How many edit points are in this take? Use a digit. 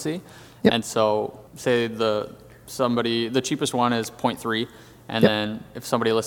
1